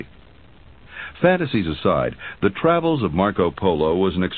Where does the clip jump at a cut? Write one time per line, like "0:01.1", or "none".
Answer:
0:01.8